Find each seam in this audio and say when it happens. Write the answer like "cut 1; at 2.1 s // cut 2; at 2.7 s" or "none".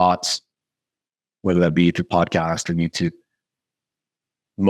cut 1; at 1.4 s